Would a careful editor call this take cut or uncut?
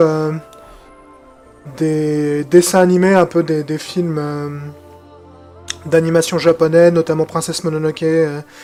uncut